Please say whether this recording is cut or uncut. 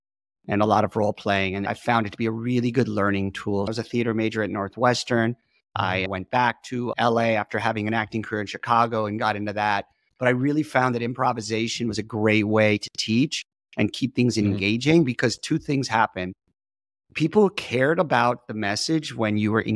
cut